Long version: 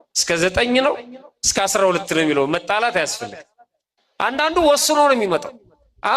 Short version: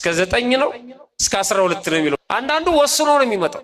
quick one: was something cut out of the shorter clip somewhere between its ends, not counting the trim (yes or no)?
yes